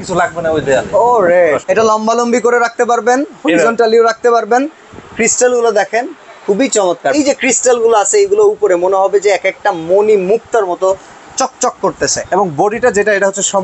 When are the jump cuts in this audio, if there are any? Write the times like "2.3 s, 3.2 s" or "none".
1.6 s, 7.1 s, 12.2 s

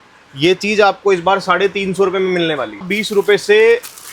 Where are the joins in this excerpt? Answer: 2.9 s

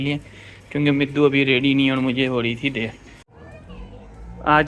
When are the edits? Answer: 3.3 s

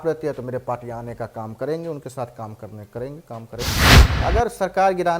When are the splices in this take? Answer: 3.9 s

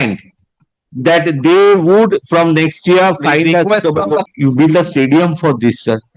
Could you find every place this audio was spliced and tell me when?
4.3 s

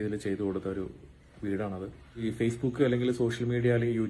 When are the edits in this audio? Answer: 2.3 s

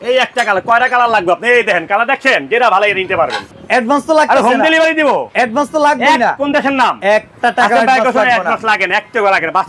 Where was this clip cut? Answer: 3.4 s, 5.3 s, 7.0 s

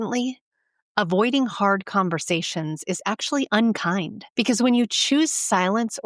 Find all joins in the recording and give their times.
4.2 s

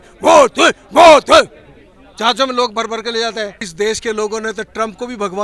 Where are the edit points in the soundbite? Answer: 3.7 s

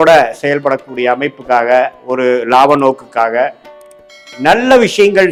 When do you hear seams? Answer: none

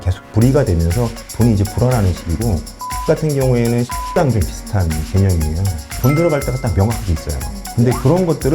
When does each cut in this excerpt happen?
4.2 s, 5.9 s

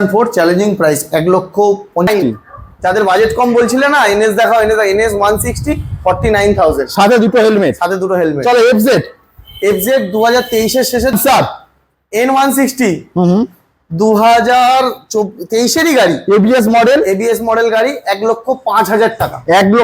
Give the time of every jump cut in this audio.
2.1 s, 11.2 s

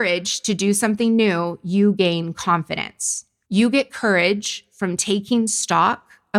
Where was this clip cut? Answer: none

